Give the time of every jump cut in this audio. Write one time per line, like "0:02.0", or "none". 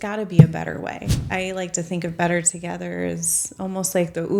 0:01.2